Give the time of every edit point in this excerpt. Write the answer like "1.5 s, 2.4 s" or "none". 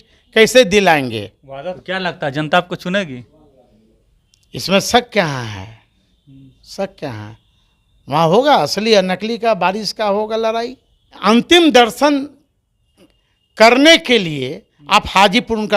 1.8 s, 11.2 s